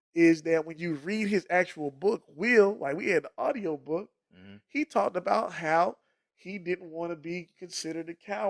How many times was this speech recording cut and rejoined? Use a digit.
0